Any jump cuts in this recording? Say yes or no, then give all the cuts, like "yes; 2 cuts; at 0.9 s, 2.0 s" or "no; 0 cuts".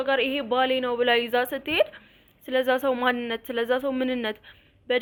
no; 0 cuts